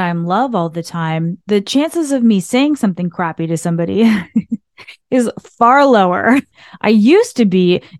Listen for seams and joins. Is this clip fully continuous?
no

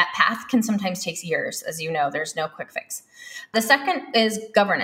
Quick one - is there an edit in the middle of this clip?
yes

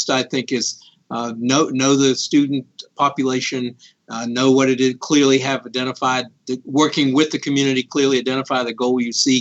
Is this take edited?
no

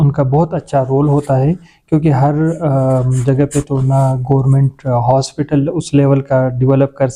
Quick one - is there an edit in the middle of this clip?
no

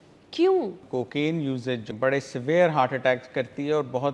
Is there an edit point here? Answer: yes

